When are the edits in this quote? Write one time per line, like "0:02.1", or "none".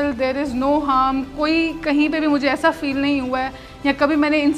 none